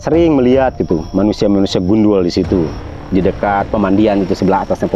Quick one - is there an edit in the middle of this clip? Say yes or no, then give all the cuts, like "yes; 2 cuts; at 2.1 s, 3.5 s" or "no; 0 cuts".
no; 0 cuts